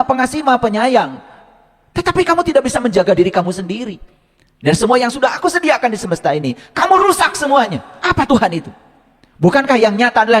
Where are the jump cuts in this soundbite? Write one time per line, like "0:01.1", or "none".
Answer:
0:07.9